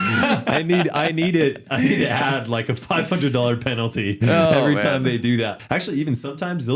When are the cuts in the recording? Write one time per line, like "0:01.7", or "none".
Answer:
0:05.6